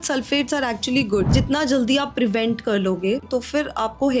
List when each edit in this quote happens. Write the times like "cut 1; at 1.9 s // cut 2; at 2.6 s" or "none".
cut 1; at 1.3 s // cut 2; at 3.3 s